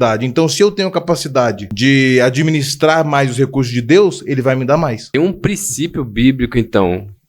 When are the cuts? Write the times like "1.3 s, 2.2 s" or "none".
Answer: 1.7 s, 5.0 s